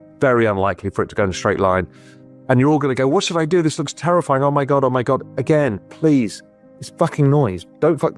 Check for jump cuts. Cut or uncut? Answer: uncut